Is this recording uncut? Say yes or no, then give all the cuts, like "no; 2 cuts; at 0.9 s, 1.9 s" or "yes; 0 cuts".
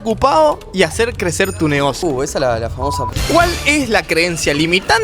no; 2 cuts; at 2.0 s, 3.1 s